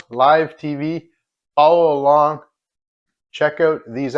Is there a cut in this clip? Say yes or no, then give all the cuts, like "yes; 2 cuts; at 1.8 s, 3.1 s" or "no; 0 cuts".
no; 0 cuts